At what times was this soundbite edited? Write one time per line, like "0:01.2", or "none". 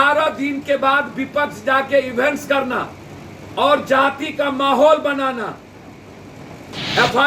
none

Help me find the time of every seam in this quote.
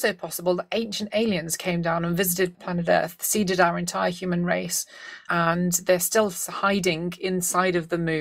none

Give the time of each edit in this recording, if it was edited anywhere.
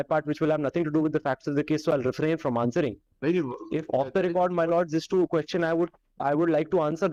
none

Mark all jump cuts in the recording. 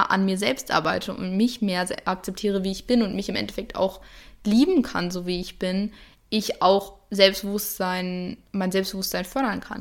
none

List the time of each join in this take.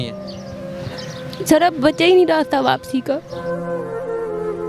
none

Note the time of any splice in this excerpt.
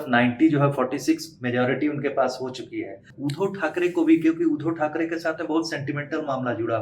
0:03.0

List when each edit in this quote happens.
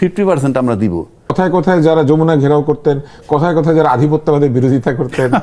0:01.3

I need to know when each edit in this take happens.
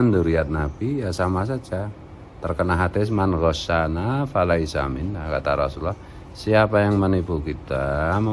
none

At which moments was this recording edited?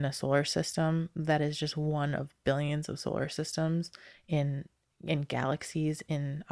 none

